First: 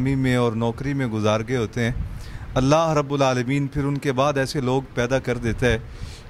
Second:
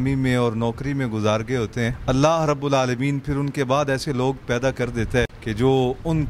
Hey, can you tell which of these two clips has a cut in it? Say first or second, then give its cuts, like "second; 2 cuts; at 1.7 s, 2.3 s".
second; 2 cuts; at 2.0 s, 5.4 s